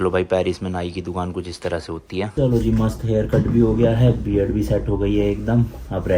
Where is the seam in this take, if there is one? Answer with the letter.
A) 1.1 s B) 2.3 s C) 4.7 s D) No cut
B